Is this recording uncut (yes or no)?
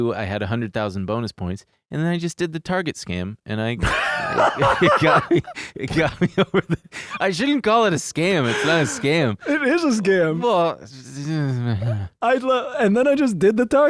yes